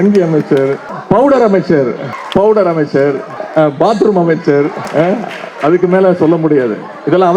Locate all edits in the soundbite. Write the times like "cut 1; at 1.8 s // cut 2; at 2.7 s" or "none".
cut 1; at 0.9 s // cut 2; at 2.1 s // cut 3; at 3.3 s // cut 4; at 4.8 s

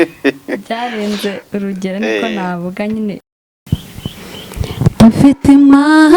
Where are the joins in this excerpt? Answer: cut 1; at 3.3 s

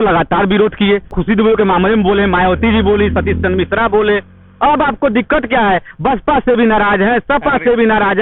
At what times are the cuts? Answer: cut 1; at 1.1 s

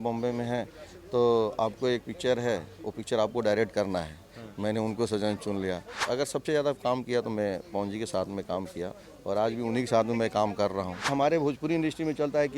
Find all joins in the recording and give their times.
cut 1; at 5.9 s // cut 2; at 11.1 s

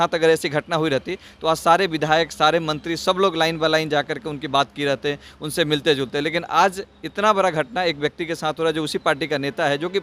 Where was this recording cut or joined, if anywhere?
none

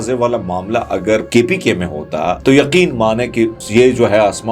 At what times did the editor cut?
cut 1; at 1.3 s // cut 2; at 2.4 s // cut 3; at 3.6 s

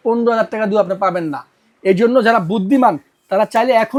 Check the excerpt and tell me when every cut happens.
none

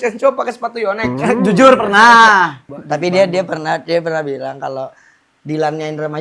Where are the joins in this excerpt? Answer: cut 1; at 2.6 s

